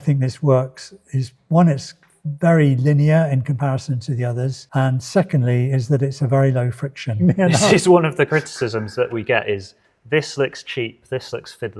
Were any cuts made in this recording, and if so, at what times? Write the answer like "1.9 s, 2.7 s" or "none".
7.1 s